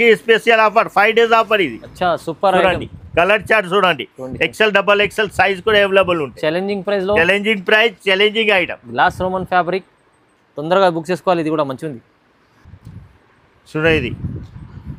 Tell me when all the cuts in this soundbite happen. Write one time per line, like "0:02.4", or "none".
none